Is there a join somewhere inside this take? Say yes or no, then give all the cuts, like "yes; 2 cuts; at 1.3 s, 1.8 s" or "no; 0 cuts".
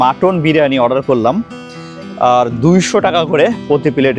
no; 0 cuts